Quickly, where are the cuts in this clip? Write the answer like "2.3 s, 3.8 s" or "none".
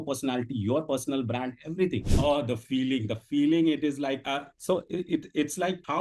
2.0 s